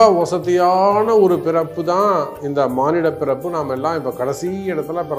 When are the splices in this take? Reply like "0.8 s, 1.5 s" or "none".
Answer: none